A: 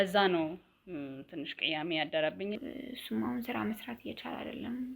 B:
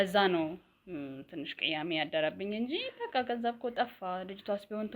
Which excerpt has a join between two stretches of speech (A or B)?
A